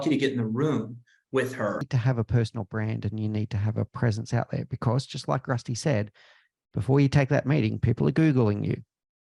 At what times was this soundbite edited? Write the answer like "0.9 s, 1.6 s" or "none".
1.9 s